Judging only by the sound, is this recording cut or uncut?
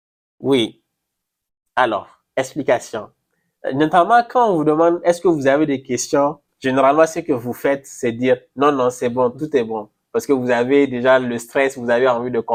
uncut